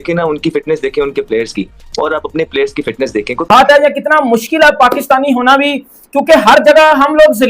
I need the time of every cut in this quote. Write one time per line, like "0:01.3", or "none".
0:03.5